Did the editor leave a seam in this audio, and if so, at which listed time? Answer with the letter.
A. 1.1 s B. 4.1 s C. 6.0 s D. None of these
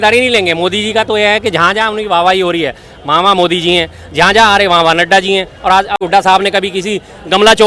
C